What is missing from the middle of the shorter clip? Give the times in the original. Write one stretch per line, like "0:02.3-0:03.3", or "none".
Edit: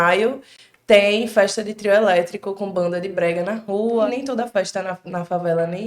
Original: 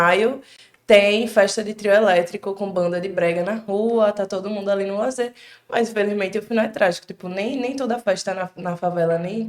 0:04.1-0:07.6